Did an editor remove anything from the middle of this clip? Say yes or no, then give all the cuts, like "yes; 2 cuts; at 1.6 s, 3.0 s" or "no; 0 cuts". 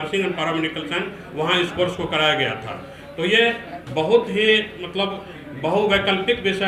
no; 0 cuts